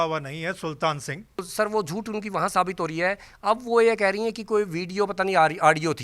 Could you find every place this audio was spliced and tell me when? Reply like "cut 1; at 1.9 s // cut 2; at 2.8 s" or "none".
cut 1; at 1.4 s

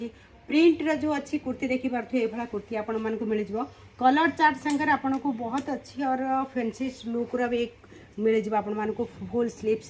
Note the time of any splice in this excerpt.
none

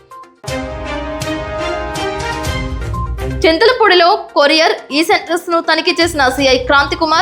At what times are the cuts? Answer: cut 1; at 3.1 s

